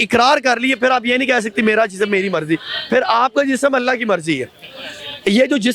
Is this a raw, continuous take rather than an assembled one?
yes; 0 cuts

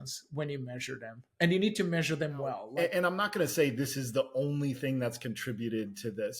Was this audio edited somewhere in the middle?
yes; 1 cut; at 2.6 s

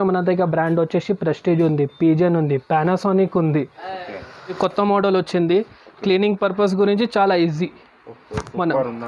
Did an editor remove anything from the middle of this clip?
yes; 1 cut; at 4.6 s

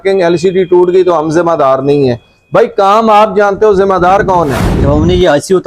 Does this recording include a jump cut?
yes; 1 cut; at 4.7 s

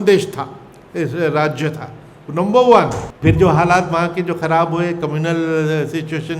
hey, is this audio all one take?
no; 1 cut; at 3.0 s

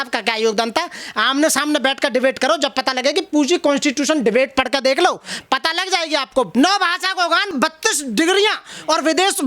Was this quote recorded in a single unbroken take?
no; 2 cuts; at 6.5 s, 7.5 s

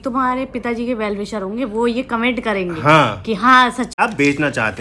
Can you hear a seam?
yes; 1 cut; at 3.9 s

